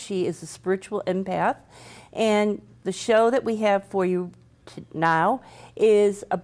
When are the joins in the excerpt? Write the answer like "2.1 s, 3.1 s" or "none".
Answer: 4.8 s

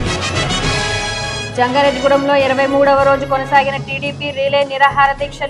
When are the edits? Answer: 1.4 s

